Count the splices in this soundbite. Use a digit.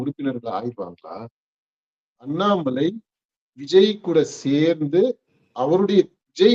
1